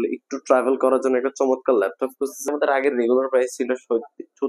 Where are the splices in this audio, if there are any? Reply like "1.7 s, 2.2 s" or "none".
2.5 s